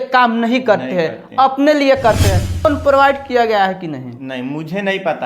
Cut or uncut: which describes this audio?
cut